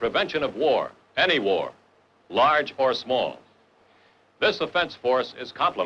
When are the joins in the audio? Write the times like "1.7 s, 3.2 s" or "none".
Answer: 3.6 s

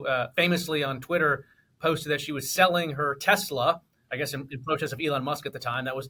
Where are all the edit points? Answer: none

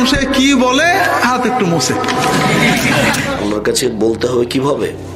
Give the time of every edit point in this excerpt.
none

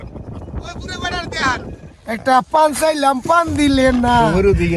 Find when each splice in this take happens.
1.7 s

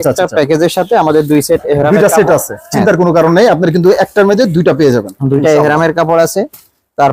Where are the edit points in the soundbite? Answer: none

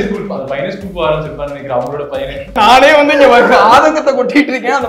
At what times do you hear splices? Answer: 2.6 s

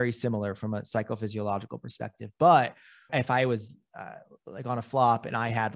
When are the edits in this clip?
3.1 s

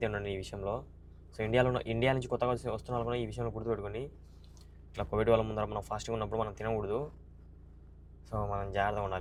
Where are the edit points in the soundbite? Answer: none

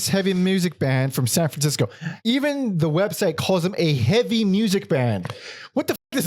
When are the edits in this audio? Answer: 2.1 s

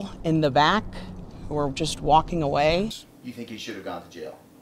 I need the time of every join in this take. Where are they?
none

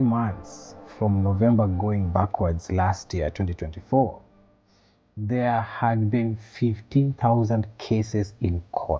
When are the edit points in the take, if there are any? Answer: none

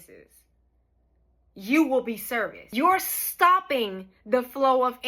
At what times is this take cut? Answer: 2.6 s

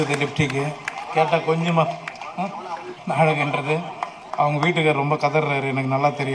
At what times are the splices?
2.9 s

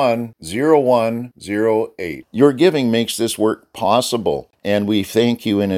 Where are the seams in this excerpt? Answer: 4.5 s

